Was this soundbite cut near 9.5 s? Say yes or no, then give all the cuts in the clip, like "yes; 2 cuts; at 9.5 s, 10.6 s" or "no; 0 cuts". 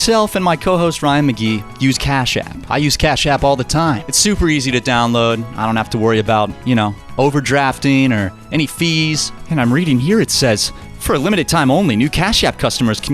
yes; 2 cuts; at 2.6 s, 9.5 s